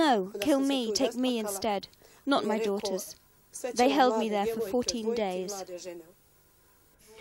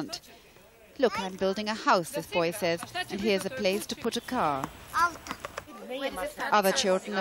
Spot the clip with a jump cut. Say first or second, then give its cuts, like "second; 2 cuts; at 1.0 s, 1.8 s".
second; 1 cut; at 2.7 s